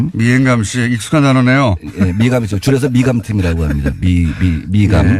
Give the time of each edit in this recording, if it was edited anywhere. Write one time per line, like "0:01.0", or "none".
0:02.5